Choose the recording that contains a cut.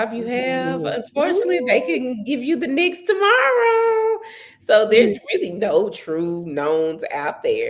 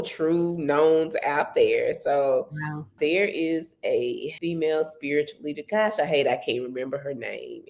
second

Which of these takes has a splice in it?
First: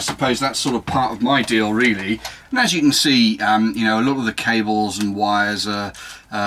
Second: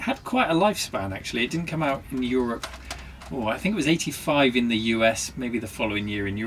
first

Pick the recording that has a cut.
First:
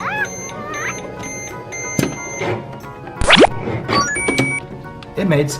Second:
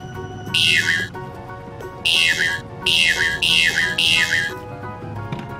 first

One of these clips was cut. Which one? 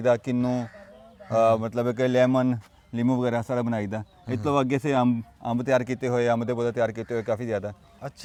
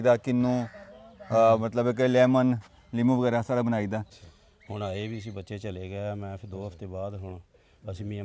second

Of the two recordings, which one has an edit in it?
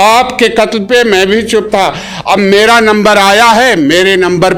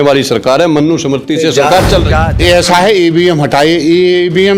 second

